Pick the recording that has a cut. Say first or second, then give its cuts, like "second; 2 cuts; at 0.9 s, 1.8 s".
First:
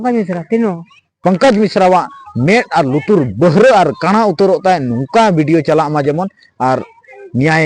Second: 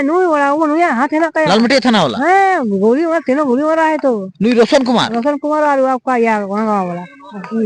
first; 1 cut; at 1.1 s